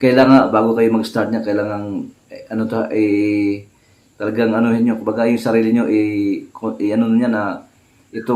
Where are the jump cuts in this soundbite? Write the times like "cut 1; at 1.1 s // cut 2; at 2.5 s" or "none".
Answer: none